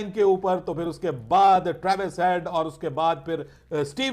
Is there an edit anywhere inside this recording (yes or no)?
no